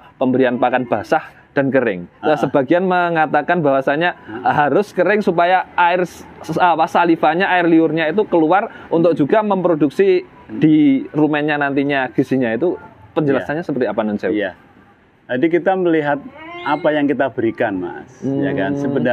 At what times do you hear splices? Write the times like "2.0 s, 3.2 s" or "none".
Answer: none

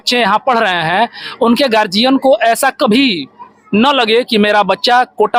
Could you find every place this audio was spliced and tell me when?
none

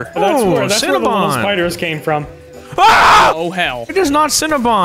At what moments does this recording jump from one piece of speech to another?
3.8 s

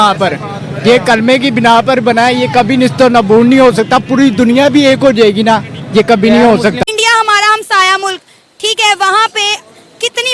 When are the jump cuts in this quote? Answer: 6.8 s

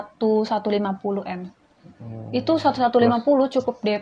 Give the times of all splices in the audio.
none

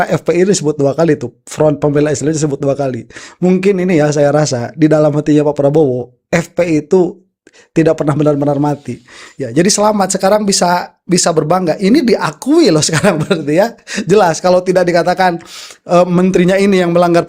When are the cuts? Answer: none

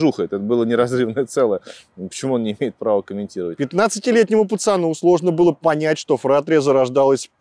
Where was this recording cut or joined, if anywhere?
3.5 s

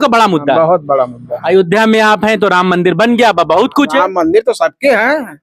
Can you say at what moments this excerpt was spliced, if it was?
1.4 s

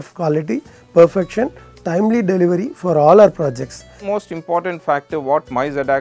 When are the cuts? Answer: 4.0 s

